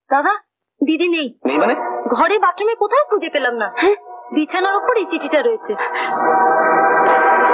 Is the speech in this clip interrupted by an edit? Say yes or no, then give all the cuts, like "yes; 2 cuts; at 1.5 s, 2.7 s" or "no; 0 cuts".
no; 0 cuts